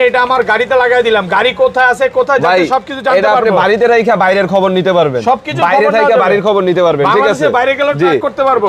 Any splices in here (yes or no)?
no